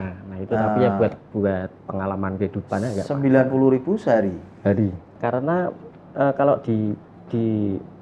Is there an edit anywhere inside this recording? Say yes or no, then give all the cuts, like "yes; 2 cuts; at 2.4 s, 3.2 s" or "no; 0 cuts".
yes; 1 cut; at 5.1 s